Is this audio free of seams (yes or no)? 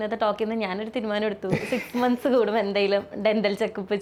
yes